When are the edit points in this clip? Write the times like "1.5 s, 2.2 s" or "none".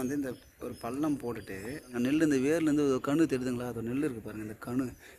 1.9 s

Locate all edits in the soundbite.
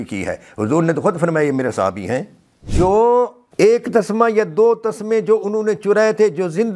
2.7 s, 3.4 s

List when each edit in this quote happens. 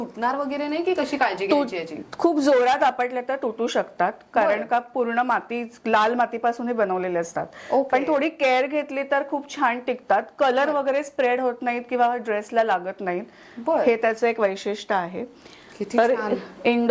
none

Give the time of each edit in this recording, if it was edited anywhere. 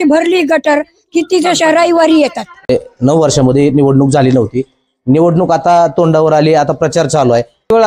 2.7 s

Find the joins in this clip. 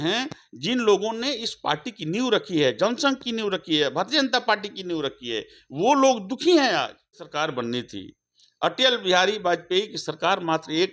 7.3 s

